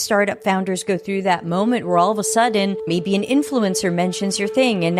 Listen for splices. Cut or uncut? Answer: uncut